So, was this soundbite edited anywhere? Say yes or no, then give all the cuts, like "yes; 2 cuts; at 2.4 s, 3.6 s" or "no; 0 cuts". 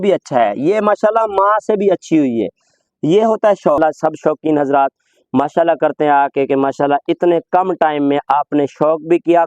yes; 1 cut; at 3.8 s